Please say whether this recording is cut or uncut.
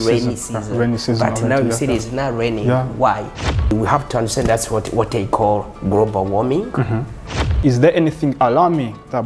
cut